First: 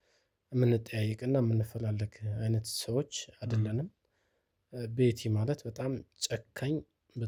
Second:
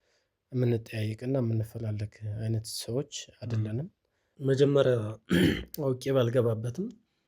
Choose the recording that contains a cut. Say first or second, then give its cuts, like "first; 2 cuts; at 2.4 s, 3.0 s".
second; 1 cut; at 4.2 s